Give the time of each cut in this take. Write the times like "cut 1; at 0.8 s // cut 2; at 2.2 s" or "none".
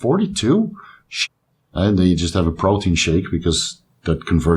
cut 1; at 1.1 s